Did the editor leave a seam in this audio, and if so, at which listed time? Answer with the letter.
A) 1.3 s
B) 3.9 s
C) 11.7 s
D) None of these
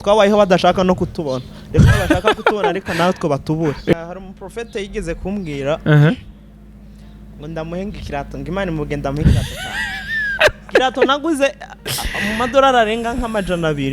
B